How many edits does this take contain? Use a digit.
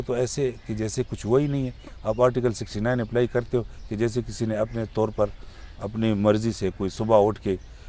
0